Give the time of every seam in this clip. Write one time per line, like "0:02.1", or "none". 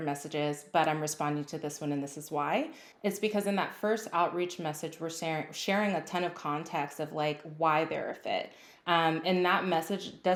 none